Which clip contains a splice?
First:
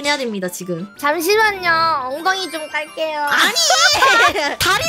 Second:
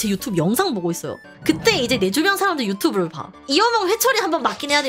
second; 2 cuts; at 1.2 s, 3.4 s

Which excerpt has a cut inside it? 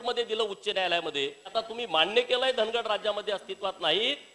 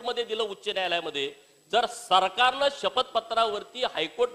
first; 1 cut; at 1.5 s

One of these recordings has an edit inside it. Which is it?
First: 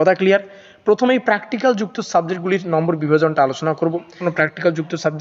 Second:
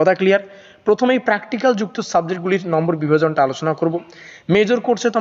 first; 1 cut; at 4.2 s

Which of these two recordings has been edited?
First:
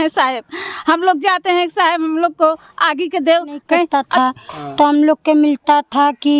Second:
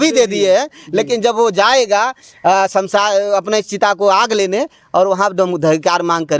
first; 1 cut; at 4.0 s

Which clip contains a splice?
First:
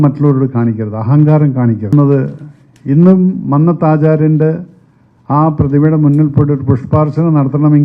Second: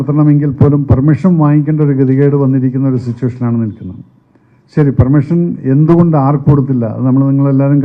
first; 1 cut; at 1.9 s

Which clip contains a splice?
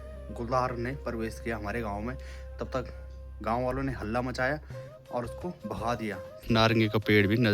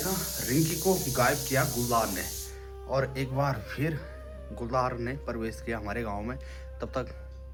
first; 1 cut; at 6.4 s

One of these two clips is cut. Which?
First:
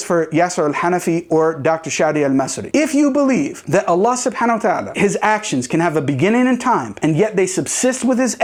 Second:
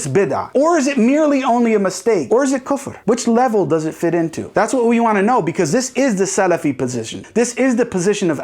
second; 2 cuts; at 2.2 s, 7.1 s

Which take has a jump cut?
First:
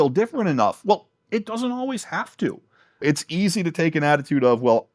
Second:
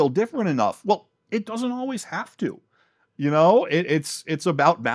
first; 1 cut; at 3.0 s

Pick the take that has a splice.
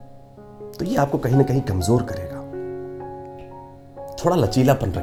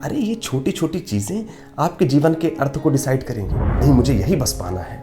second; 1 cut; at 3.8 s

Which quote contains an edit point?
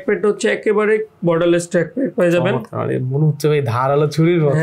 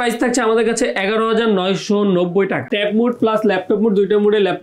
second; 1 cut; at 2.7 s

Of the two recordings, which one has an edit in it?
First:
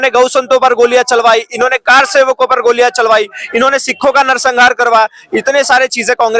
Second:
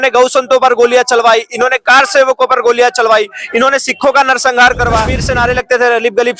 second; 1 cut; at 5.2 s

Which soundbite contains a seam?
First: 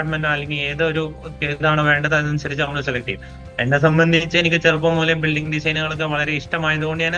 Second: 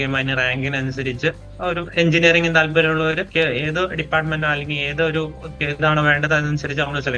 second; 2 cuts; at 1.9 s, 3.2 s

